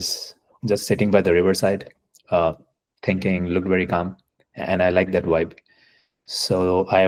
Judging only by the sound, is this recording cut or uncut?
uncut